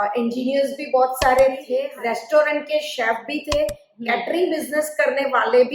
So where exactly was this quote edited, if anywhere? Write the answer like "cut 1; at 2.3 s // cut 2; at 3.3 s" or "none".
cut 1; at 1.8 s